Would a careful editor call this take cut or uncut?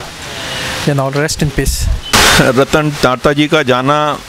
cut